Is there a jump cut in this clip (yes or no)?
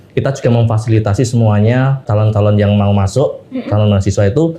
yes